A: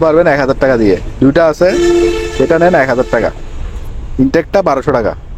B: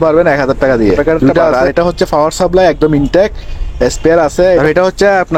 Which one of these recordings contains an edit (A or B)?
B